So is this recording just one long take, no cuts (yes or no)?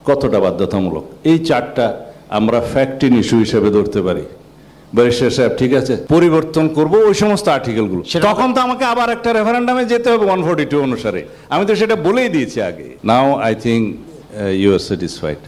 no